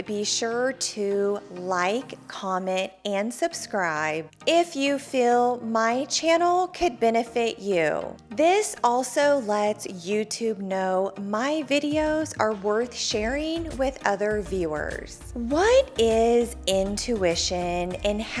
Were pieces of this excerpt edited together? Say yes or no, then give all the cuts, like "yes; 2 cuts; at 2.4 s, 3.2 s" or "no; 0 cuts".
yes; 1 cut; at 15.2 s